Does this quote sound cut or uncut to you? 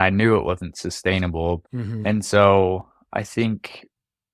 cut